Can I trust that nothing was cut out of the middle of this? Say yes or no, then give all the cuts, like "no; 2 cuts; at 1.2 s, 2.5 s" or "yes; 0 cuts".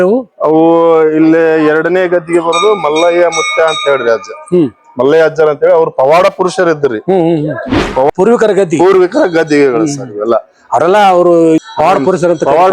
no; 2 cuts; at 8.1 s, 11.6 s